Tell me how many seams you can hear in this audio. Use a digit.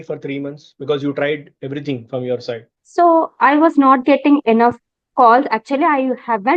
1